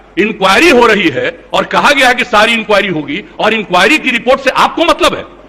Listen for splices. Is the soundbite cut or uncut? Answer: uncut